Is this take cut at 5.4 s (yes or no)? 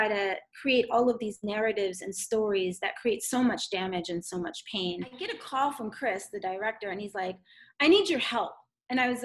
yes